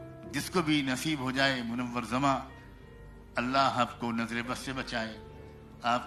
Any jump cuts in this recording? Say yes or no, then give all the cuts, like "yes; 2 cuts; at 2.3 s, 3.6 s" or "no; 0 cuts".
no; 0 cuts